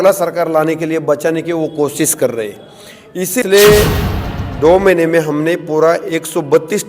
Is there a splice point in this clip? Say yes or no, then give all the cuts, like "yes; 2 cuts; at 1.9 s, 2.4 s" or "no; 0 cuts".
yes; 1 cut; at 3.2 s